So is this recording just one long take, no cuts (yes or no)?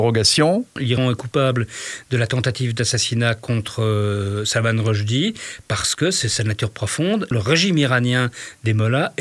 no